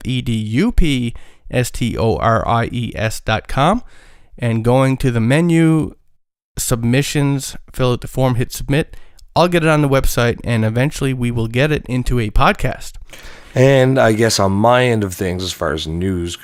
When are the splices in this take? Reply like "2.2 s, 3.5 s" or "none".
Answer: none